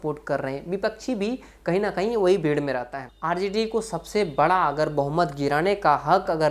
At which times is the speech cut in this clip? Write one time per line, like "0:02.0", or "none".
0:03.0